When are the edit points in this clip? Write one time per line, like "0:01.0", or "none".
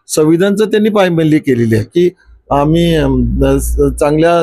0:01.9